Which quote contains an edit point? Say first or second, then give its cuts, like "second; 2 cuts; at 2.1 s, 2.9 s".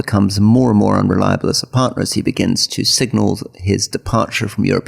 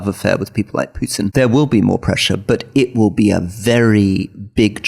second; 1 cut; at 1.3 s